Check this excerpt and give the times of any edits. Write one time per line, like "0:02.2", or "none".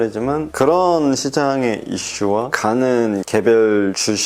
none